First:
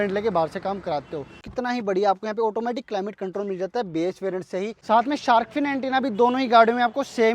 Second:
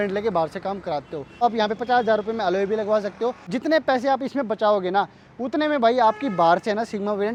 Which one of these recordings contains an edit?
first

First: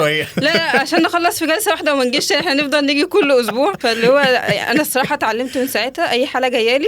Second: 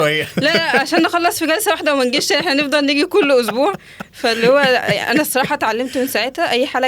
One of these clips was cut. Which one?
first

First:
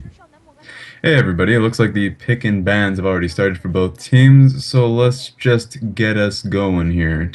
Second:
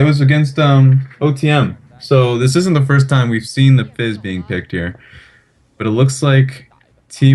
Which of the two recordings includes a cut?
second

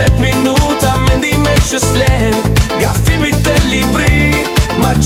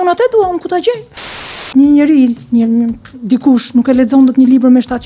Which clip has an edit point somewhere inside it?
second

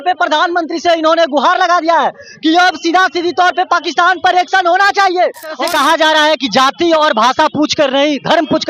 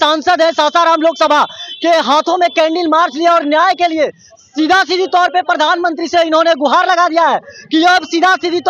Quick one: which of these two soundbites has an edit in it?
first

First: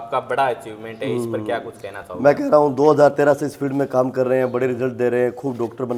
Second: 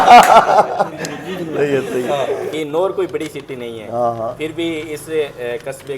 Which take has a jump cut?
second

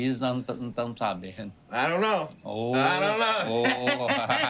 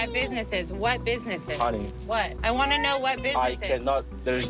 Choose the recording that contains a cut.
second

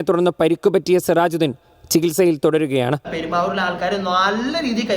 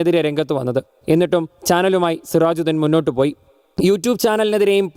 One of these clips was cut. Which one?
first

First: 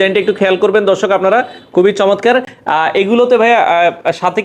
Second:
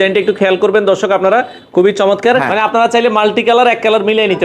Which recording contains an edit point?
second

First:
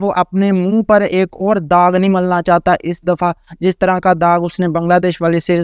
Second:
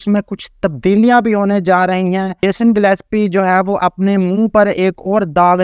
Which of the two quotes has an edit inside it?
second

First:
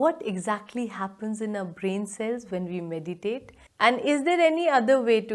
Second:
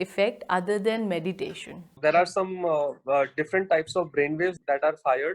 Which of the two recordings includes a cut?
second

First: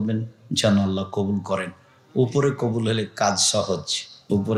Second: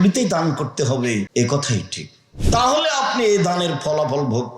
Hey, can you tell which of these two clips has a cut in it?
second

